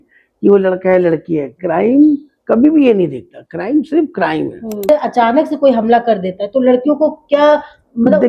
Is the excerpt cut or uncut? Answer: cut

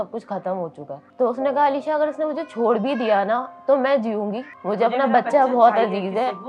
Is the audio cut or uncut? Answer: cut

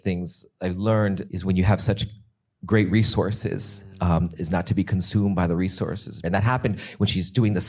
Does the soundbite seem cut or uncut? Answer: cut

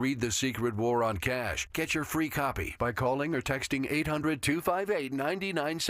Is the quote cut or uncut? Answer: uncut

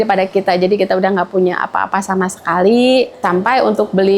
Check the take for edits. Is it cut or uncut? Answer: cut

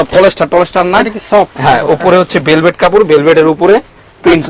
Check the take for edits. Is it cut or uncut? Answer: uncut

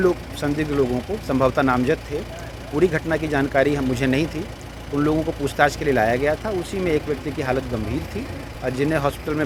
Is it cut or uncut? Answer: uncut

